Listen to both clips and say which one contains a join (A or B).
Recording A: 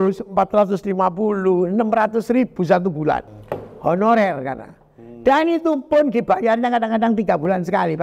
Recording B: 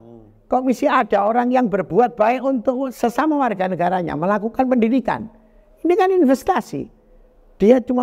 A